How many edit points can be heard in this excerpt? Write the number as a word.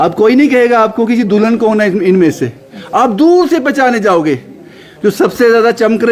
zero